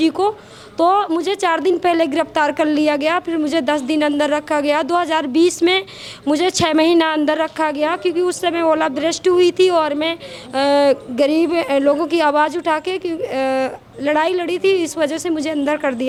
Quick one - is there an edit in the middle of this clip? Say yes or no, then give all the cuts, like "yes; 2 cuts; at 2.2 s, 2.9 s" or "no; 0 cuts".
no; 0 cuts